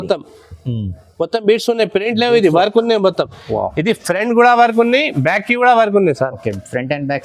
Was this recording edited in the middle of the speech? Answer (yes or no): no